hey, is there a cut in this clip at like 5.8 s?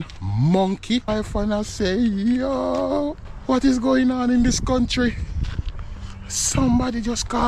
no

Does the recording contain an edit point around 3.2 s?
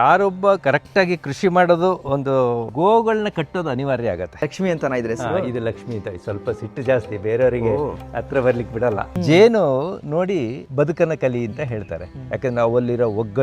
no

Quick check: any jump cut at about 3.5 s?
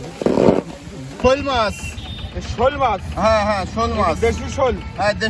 no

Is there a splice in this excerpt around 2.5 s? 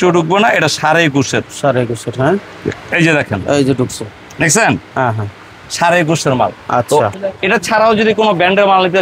no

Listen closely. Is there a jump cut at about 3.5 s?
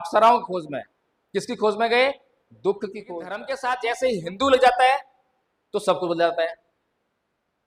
yes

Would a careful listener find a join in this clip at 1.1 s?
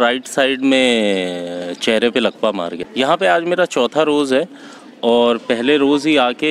no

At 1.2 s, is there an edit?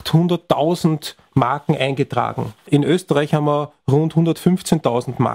no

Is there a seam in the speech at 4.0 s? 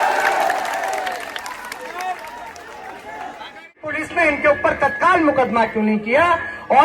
yes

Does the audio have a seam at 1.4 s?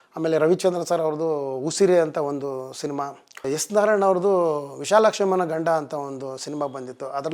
no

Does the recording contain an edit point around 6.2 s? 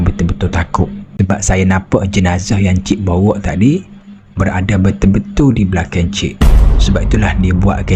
no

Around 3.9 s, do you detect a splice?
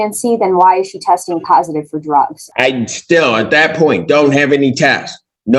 no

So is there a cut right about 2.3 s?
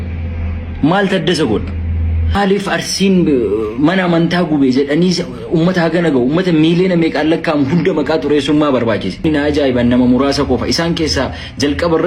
yes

